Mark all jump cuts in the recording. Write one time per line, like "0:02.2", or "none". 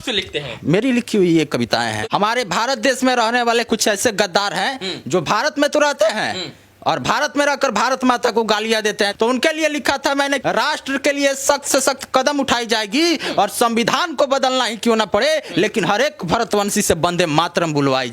0:02.0
0:09.1
0:10.4